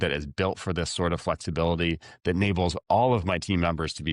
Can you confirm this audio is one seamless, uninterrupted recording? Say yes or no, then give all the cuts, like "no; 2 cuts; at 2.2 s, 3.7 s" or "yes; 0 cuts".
yes; 0 cuts